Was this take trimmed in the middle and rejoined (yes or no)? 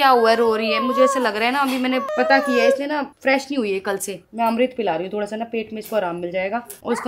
no